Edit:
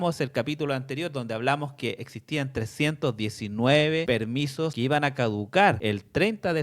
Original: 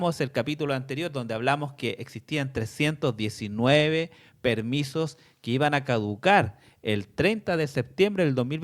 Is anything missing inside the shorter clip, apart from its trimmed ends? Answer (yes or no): yes